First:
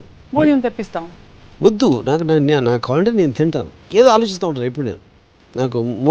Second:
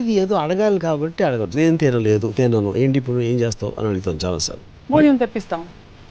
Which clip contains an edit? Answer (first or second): first